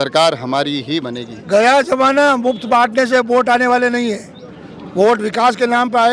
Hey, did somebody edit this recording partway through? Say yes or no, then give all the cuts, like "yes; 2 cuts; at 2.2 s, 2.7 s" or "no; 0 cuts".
no; 0 cuts